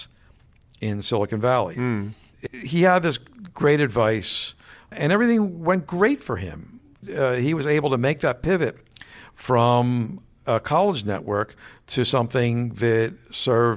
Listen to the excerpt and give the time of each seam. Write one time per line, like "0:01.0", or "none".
0:02.3